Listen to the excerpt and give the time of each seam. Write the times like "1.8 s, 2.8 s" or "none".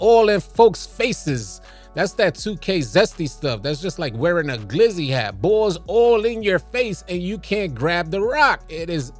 none